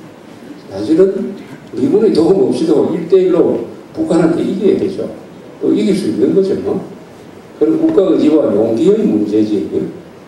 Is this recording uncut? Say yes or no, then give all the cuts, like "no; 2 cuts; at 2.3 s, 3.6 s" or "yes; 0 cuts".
no; 1 cut; at 2.7 s